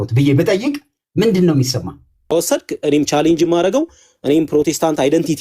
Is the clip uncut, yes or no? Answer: no